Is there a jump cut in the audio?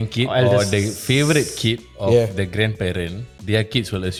no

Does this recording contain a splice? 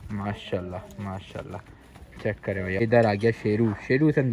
yes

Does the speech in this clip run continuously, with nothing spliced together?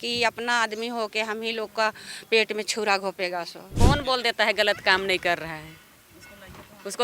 no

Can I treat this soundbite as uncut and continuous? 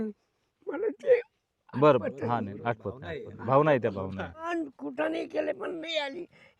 no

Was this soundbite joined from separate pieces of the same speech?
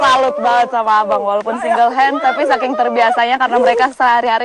no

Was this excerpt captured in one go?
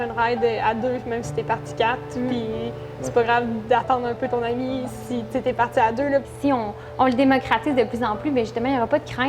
no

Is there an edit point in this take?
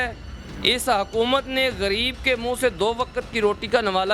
no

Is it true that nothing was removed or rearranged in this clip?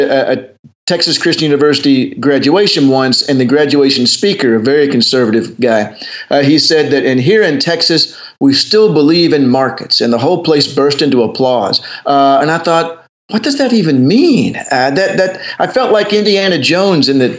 yes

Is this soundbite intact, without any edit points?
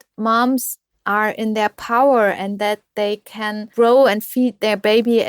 no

